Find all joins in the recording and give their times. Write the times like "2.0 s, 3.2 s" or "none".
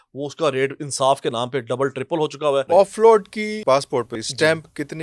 2.7 s, 4.2 s